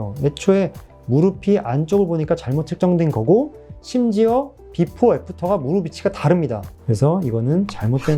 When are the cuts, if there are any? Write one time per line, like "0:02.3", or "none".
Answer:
0:06.7